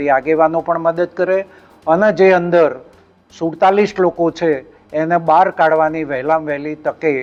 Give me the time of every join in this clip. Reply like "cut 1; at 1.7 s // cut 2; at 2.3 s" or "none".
none